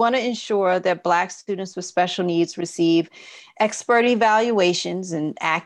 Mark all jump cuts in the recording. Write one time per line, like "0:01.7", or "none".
none